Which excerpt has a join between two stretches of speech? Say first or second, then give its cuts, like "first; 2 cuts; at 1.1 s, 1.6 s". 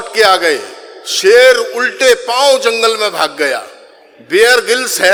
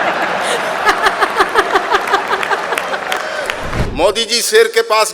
second; 1 cut; at 3.8 s